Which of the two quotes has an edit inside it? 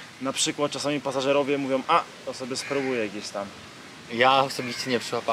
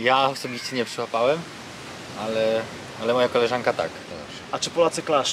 second; 1 cut; at 4.1 s

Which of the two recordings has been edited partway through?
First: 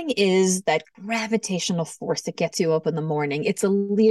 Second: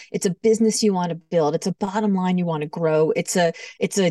first; 1 cut; at 0.9 s

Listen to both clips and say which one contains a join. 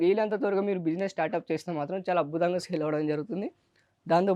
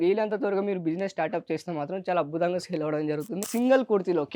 second; 1 cut; at 3.4 s

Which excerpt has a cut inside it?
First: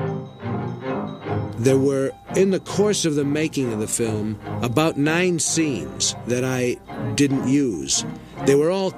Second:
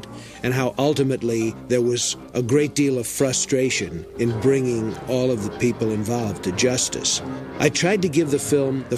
second; 1 cut; at 2.2 s

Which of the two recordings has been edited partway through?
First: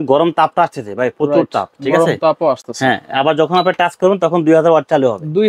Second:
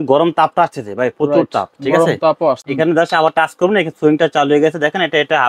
second; 1 cut; at 2.7 s

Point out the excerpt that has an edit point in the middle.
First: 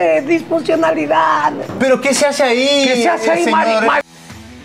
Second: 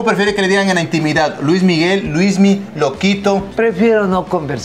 second; 1 cut; at 3.5 s

